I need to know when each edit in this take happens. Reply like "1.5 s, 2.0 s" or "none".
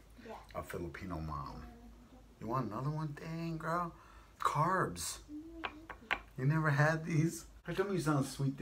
7.5 s